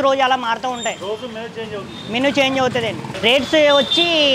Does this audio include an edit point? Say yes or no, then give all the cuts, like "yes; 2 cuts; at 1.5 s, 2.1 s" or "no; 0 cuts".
yes; 1 cut; at 3.1 s